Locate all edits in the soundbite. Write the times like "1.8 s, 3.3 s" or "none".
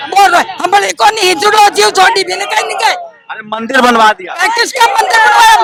none